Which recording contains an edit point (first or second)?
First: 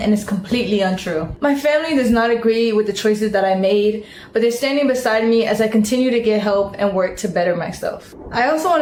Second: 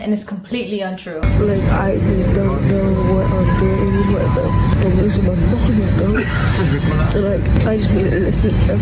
second